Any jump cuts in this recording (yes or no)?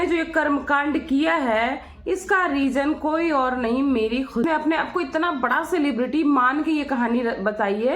yes